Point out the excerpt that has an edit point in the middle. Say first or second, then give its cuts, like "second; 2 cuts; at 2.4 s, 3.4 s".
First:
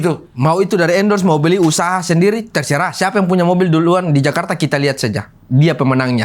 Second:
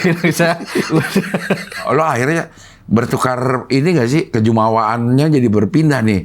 second; 1 cut; at 1.8 s